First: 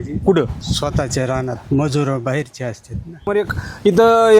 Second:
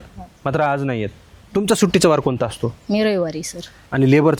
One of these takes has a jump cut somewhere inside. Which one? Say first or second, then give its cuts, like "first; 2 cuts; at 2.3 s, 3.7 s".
first; 1 cut; at 3.3 s